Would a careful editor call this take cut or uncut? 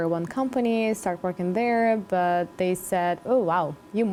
uncut